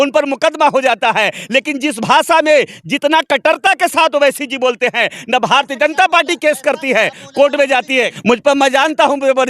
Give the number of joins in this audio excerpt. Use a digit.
1